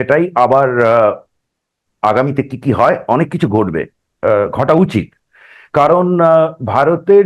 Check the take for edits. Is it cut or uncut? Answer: uncut